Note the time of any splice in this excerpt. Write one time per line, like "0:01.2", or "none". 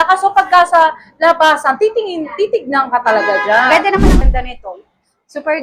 0:04.2